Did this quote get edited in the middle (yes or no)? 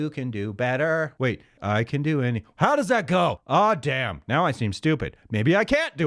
yes